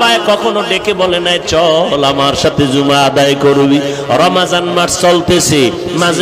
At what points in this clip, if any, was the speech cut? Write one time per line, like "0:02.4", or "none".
none